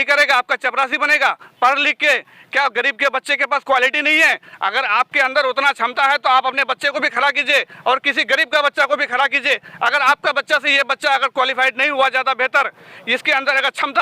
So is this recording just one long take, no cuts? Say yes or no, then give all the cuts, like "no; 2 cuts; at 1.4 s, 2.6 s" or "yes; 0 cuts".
yes; 0 cuts